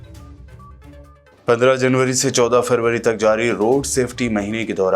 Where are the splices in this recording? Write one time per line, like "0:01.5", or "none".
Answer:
0:01.1